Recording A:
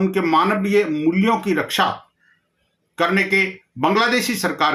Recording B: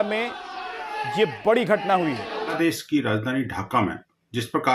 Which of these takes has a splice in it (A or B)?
B